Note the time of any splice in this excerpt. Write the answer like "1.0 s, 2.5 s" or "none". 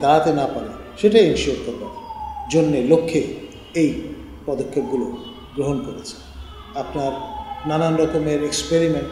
none